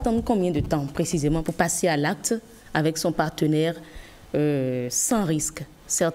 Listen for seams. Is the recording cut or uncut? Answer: cut